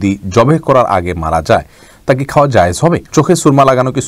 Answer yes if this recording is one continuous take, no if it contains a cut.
no